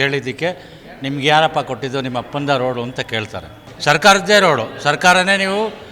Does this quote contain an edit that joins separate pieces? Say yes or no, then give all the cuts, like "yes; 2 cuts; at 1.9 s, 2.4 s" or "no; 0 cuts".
yes; 1 cut; at 3.6 s